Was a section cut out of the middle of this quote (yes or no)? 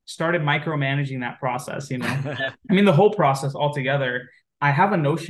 yes